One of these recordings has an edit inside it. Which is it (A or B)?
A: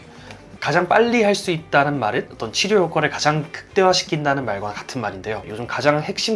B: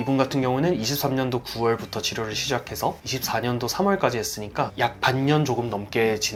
A